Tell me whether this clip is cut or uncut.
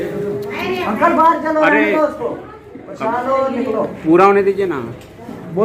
uncut